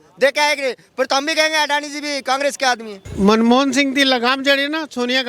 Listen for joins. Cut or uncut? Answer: cut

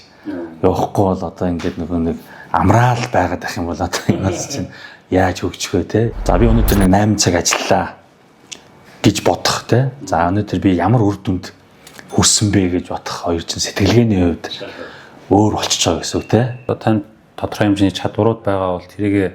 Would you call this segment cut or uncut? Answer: cut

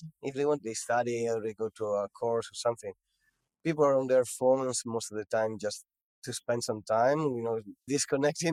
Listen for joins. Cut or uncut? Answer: uncut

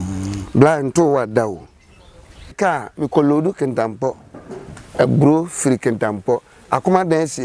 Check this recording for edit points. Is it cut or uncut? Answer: cut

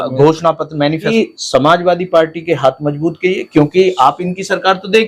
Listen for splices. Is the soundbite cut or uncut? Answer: cut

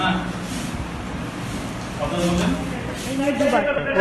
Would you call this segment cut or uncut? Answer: cut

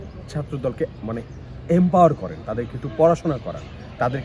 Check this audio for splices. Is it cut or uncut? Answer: uncut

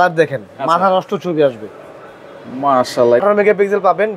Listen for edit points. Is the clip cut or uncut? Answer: cut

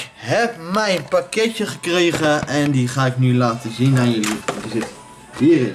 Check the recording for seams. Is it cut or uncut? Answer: uncut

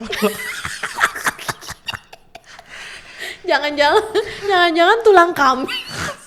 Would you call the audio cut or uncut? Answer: uncut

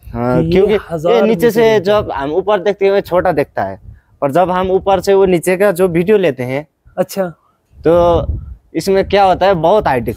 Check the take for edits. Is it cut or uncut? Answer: uncut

